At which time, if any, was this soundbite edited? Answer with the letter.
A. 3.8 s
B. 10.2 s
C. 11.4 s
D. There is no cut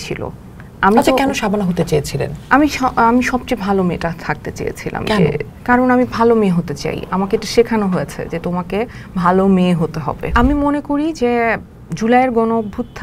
B